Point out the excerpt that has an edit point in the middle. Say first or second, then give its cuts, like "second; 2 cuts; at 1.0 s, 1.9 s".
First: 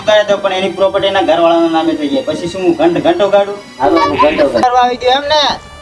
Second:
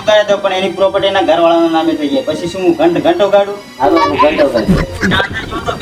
first; 1 cut; at 4.6 s